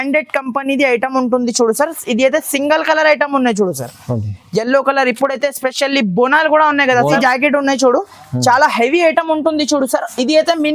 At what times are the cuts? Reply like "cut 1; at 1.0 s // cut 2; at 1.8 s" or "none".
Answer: cut 1; at 7.2 s